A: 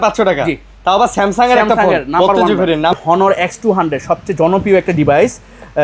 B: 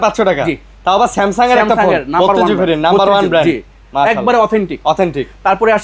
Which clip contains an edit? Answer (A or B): A